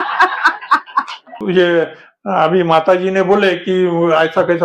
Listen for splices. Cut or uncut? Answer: cut